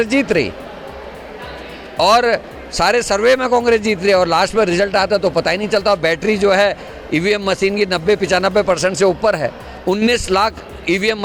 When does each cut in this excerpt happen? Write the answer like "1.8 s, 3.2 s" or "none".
none